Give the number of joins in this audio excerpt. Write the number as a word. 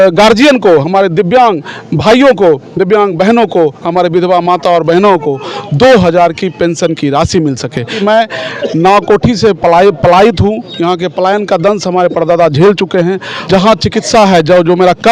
two